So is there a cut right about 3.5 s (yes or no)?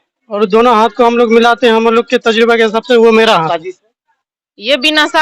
yes